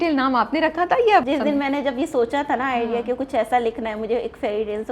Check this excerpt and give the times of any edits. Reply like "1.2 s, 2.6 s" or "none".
1.2 s